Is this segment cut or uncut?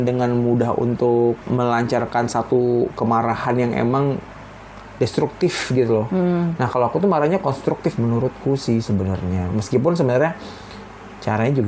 cut